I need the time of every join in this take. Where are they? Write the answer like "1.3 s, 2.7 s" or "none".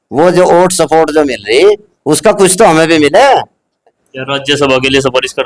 4.1 s